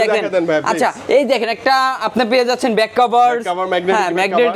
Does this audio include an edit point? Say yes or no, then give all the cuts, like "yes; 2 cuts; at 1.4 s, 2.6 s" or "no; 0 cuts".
no; 0 cuts